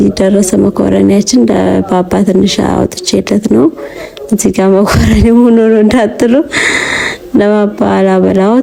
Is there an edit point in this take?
no; 0 cuts

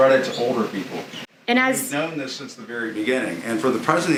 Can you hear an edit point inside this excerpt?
no; 0 cuts

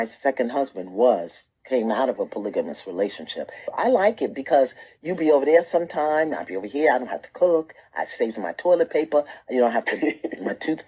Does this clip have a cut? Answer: yes; 2 cuts; at 1.8 s, 3.5 s

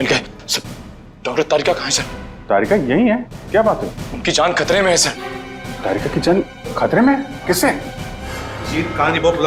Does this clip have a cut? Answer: no; 0 cuts

